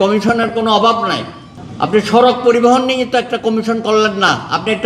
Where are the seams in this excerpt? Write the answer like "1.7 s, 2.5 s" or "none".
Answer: none